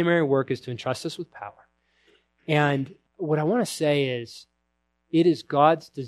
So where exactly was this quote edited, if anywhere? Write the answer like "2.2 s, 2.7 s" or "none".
3.0 s